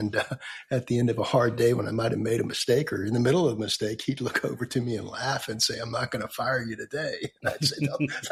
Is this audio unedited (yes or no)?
yes